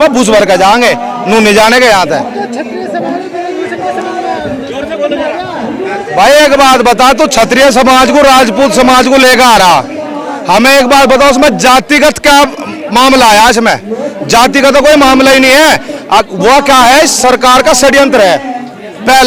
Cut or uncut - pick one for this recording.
uncut